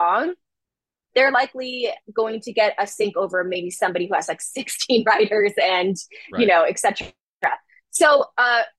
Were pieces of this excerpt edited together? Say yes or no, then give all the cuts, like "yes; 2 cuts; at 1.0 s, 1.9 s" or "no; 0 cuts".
no; 0 cuts